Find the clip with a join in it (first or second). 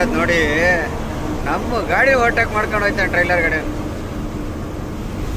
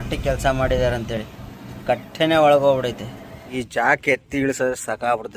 second